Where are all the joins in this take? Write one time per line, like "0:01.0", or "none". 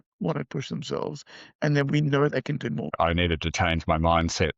0:02.9